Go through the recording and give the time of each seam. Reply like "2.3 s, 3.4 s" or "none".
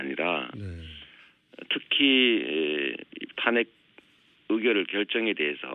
2.4 s